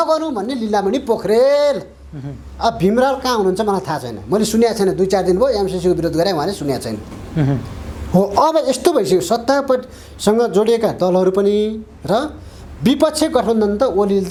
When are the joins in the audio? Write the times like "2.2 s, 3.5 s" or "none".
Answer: none